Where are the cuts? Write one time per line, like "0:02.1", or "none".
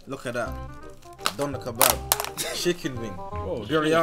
0:01.1